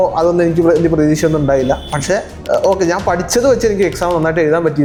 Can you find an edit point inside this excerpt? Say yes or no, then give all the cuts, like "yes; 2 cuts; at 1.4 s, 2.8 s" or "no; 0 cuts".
no; 0 cuts